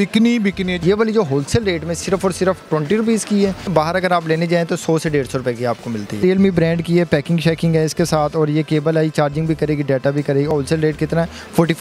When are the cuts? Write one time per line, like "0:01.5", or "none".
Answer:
0:00.8
0:03.7
0:06.2
0:10.5